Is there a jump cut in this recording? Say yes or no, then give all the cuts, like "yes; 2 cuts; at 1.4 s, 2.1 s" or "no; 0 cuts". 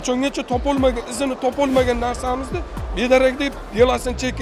no; 0 cuts